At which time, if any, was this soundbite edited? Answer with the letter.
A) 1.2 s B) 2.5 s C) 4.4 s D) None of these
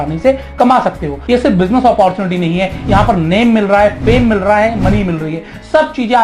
A